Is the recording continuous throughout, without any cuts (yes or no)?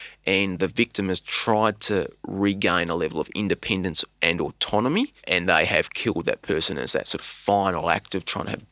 no